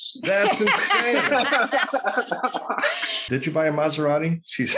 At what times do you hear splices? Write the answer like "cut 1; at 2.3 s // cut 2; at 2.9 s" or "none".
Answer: cut 1; at 3.2 s

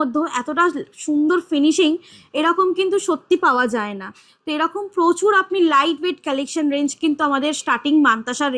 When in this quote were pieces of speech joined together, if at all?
none

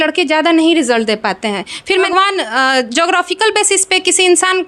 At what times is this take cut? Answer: cut 1; at 2.1 s

